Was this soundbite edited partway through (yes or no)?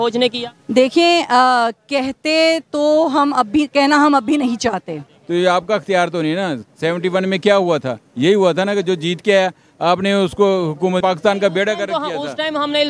yes